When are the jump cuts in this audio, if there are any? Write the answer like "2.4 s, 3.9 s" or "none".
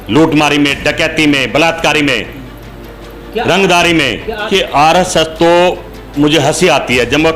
4.5 s